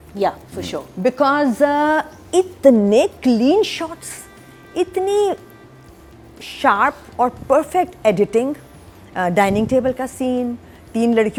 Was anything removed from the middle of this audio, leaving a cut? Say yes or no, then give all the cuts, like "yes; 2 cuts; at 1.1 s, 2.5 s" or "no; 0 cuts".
no; 0 cuts